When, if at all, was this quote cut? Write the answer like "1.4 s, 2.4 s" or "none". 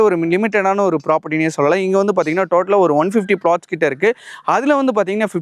none